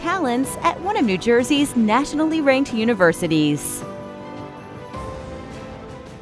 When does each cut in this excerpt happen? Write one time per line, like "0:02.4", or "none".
0:03.6